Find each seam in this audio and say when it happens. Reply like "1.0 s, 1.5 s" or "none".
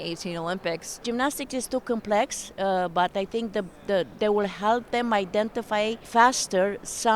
1.0 s, 6.0 s

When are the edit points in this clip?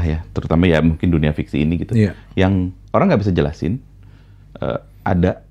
none

